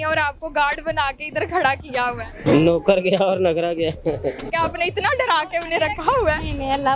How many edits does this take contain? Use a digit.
2